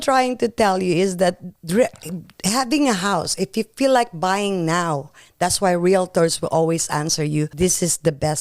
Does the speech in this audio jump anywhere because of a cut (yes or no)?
yes